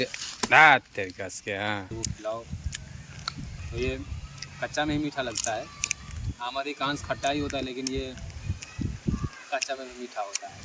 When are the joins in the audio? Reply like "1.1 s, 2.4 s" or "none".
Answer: none